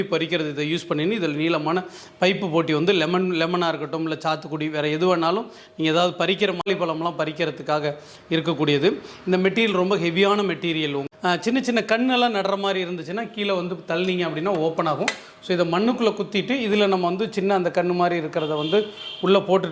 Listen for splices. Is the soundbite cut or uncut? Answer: cut